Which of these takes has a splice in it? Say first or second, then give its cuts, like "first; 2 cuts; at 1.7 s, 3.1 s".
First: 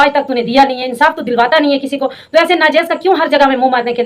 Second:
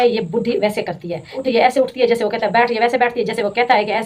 second; 1 cut; at 1.4 s